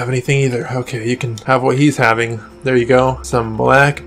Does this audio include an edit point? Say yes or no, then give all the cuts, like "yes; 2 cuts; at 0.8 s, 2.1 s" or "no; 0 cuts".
yes; 2 cuts; at 1.3 s, 3.2 s